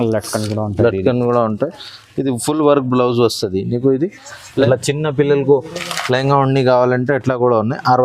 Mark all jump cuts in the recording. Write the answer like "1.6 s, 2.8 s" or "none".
4.4 s